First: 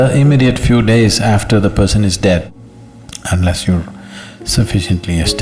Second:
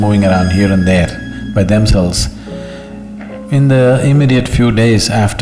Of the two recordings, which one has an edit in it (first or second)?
first